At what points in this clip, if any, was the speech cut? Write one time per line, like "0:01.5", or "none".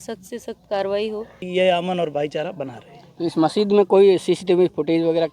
0:01.4